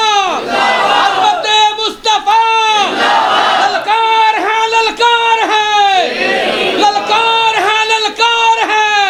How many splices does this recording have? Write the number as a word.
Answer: zero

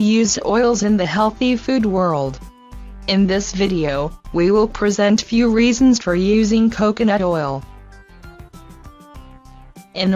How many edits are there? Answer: one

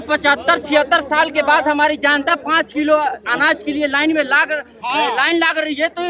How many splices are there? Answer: zero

